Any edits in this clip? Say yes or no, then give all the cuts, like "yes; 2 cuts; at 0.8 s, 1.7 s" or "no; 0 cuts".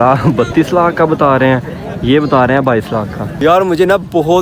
yes; 1 cut; at 3.3 s